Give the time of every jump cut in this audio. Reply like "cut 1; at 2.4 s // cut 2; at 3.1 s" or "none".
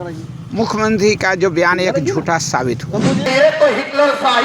cut 1; at 3.2 s